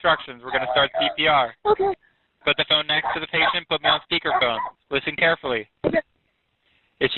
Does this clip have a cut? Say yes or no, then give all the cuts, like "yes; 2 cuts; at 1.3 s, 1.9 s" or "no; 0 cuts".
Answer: yes; 1 cut; at 1.5 s